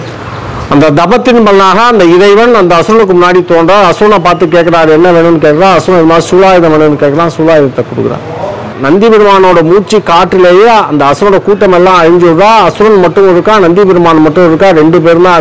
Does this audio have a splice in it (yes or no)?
yes